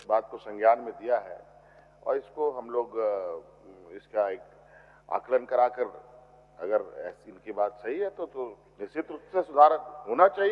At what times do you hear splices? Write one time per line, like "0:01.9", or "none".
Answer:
none